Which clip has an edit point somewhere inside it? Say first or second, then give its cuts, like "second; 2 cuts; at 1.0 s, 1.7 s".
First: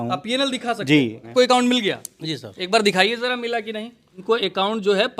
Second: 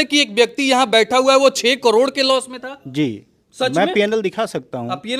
first; 2 cuts; at 1.3 s, 4.2 s